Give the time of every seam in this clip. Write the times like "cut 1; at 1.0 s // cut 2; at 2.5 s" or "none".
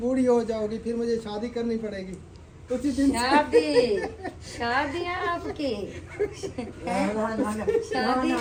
none

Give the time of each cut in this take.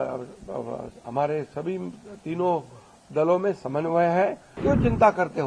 cut 1; at 4.5 s

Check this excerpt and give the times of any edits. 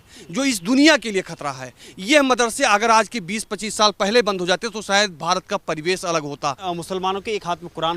cut 1; at 6.6 s

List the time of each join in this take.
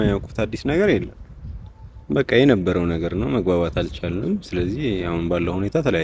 none

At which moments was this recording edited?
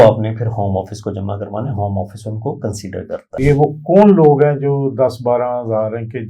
cut 1; at 3.4 s

